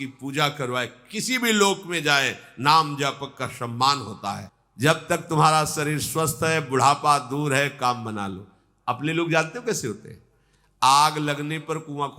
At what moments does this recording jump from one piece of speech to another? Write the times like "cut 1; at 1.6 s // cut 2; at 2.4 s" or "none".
cut 1; at 4.5 s